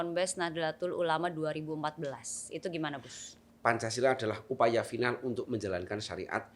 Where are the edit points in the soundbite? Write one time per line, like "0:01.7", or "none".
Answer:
0:03.4